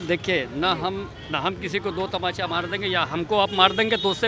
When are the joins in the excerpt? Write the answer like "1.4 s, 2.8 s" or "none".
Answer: none